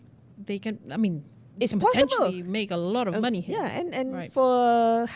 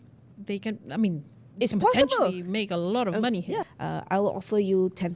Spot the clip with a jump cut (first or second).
second